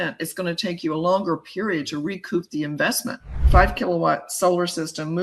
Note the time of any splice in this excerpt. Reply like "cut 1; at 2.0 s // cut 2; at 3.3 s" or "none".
cut 1; at 3.3 s